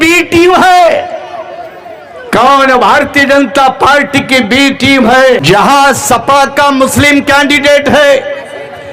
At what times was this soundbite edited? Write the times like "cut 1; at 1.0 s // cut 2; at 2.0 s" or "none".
cut 1; at 5.4 s

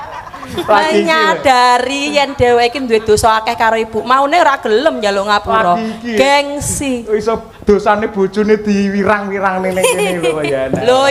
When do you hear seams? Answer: none

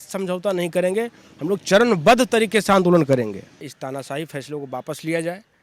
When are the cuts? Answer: cut 1; at 3.7 s

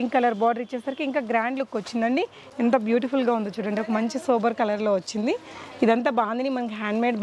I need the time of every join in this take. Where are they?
cut 1; at 2.4 s

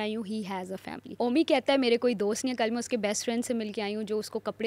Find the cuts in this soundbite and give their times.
cut 1; at 1.0 s

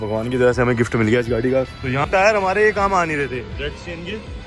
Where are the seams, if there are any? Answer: cut 1; at 1.7 s

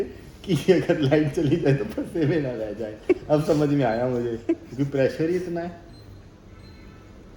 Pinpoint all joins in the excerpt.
none

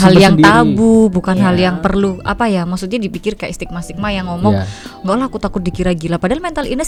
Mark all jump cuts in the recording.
none

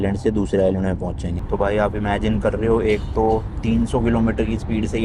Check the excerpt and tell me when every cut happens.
none

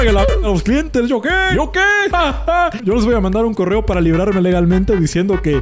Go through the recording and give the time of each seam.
cut 1; at 2.8 s

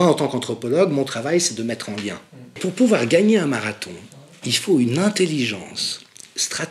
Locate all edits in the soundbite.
cut 1; at 2.6 s

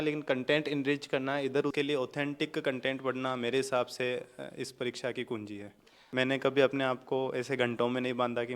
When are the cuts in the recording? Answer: cut 1; at 1.7 s // cut 2; at 6.0 s

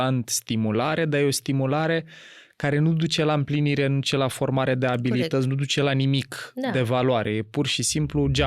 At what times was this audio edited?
none

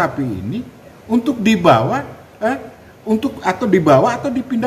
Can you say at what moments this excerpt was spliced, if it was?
none

